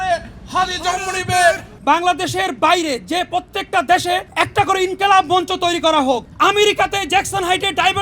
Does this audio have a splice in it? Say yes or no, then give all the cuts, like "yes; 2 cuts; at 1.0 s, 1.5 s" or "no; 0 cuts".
yes; 3 cuts; at 1.7 s, 4.3 s, 6.3 s